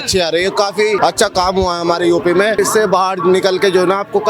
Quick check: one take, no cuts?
no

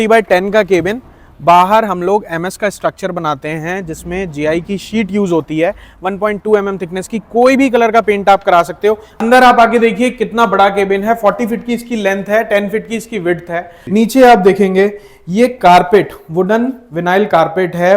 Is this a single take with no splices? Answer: no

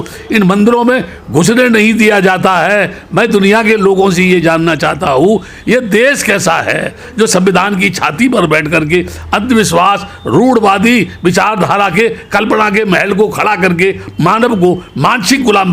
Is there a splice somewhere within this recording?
no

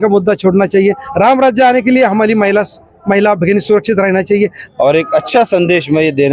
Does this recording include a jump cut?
yes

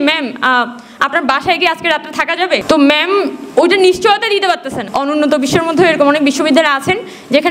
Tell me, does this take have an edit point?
yes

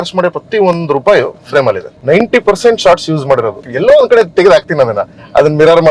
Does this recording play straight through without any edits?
no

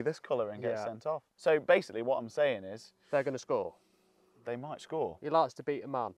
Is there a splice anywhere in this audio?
yes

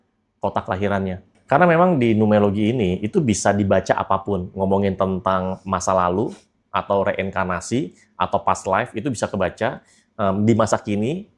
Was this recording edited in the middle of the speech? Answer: yes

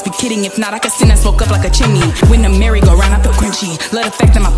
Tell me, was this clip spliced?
no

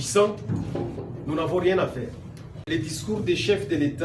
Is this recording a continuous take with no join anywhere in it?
no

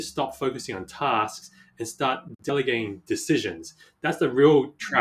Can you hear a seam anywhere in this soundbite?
yes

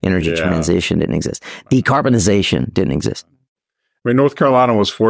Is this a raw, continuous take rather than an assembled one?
yes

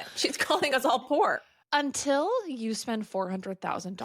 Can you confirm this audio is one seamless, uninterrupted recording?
no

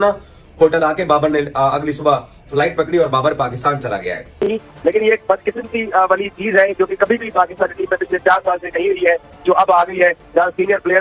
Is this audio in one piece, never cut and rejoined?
no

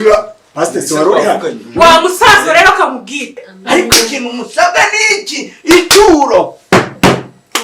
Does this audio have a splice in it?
yes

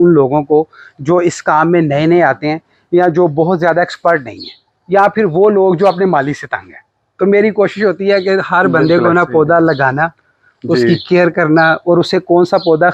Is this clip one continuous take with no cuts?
yes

